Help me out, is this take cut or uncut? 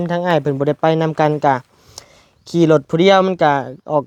uncut